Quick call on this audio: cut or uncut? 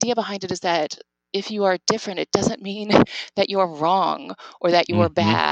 uncut